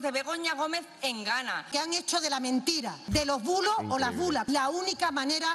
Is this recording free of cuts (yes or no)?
no